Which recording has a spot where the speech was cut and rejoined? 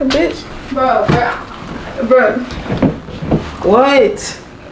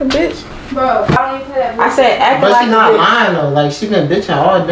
second; 1 cut; at 1.2 s

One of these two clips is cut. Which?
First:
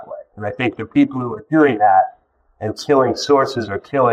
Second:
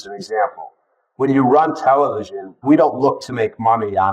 second; 1 cut; at 2.6 s

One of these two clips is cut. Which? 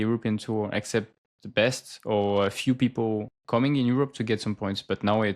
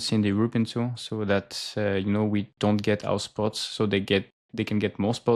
first; 1 cut; at 3.3 s

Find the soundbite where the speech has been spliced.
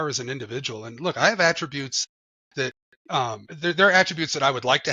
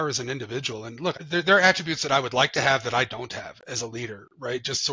second; 1 cut; at 1.2 s

